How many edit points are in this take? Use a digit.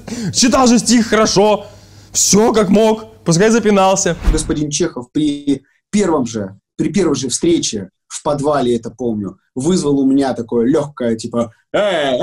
1